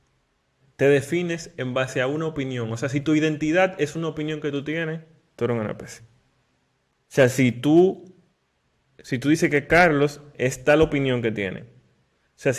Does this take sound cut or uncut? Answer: uncut